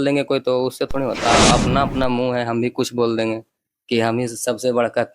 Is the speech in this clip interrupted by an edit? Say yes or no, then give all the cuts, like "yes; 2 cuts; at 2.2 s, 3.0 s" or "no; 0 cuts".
yes; 1 cut; at 1.3 s